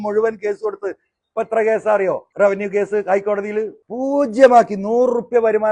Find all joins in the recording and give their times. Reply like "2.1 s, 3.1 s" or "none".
2.3 s, 3.8 s